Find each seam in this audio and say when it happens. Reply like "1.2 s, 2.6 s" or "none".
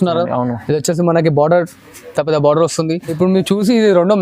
3.1 s